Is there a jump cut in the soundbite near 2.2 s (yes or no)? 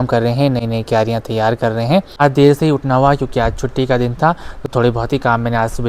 yes